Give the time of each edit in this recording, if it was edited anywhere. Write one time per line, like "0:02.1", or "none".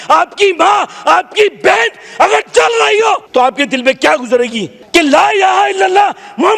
0:03.2
0:04.7